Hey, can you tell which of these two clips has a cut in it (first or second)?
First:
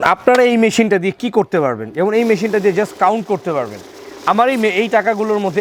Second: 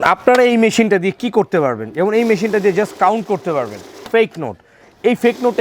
second